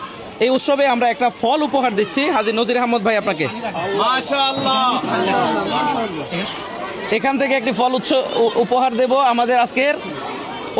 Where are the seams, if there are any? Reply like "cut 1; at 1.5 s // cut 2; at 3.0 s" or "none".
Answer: none